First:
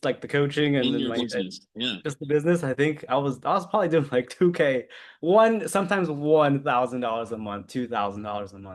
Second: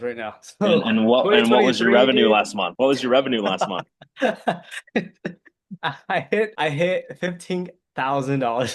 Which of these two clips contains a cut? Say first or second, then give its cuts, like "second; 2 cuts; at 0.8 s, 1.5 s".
second; 2 cuts; at 2.6 s, 6.5 s